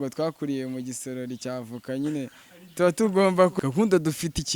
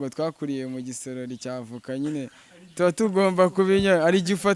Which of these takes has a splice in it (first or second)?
first